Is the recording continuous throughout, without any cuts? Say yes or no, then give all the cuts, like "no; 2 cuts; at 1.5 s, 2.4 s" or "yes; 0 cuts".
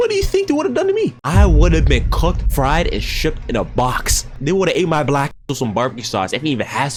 yes; 0 cuts